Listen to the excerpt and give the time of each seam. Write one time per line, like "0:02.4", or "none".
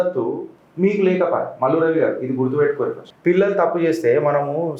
0:03.1